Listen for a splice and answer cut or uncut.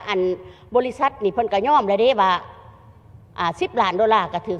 uncut